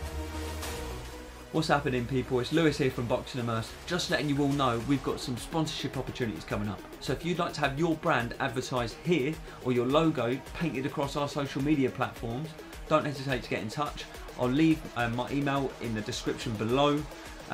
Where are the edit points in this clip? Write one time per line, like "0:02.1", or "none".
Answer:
0:01.2